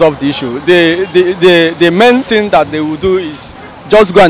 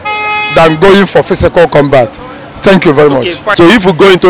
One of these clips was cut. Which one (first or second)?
second